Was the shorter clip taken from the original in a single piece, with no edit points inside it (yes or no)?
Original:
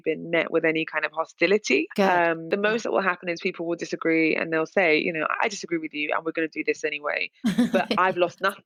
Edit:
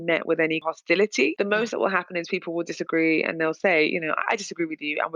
no